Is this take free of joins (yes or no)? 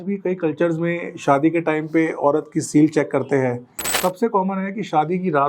no